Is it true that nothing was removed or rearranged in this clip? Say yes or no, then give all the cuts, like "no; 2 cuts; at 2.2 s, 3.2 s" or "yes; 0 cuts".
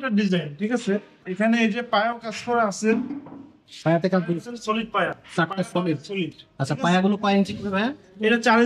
no; 1 cut; at 1.2 s